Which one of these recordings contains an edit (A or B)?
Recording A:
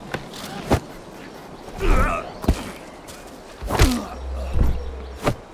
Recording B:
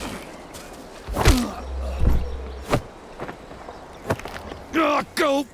B